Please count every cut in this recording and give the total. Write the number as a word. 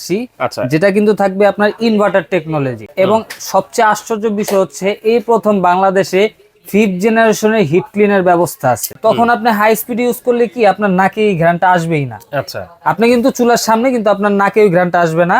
two